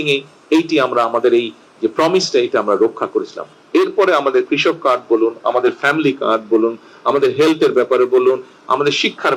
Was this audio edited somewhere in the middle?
no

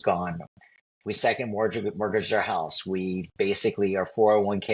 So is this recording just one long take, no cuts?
yes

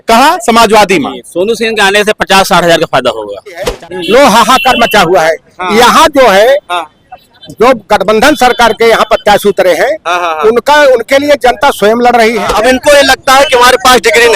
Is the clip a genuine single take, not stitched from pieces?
no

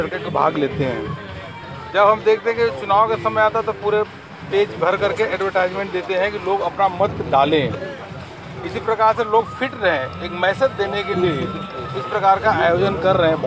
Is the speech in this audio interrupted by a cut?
no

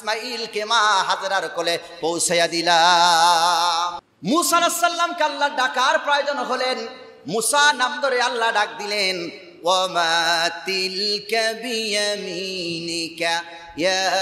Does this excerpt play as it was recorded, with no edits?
no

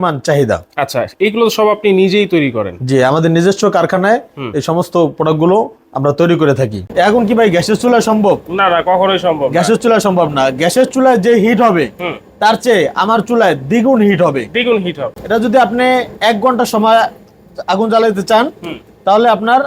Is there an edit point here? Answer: yes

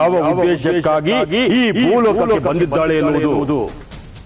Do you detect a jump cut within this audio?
no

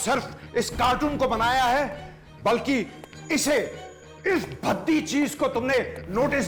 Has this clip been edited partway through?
no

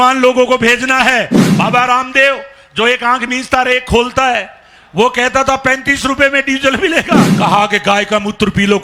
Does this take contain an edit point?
yes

